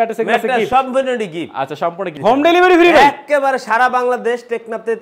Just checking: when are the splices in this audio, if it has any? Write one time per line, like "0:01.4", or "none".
0:02.1